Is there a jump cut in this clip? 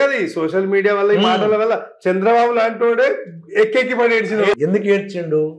yes; 1 cut; at 4.5 s

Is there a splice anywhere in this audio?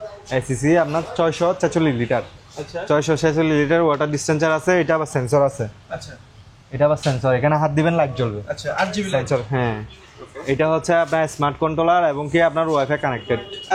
no; 0 cuts

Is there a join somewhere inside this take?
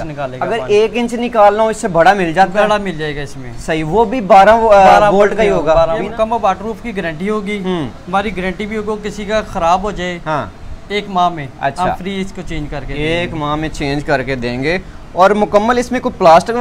no; 0 cuts

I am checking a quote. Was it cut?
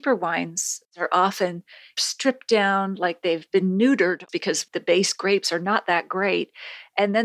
yes; 3 cuts; at 0.9 s, 2.0 s, 4.4 s

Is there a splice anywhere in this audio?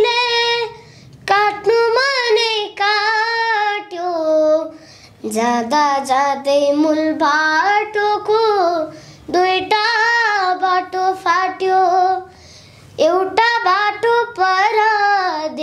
no; 0 cuts

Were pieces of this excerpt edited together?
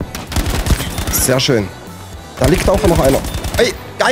no; 0 cuts

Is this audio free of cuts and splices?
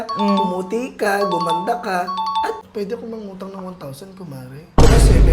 no; 1 cut; at 2.6 s

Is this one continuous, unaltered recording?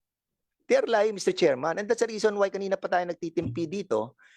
yes; 0 cuts

